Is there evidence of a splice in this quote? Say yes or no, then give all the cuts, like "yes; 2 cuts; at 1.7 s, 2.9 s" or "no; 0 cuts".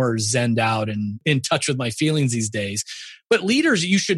yes; 1 cut; at 1.2 s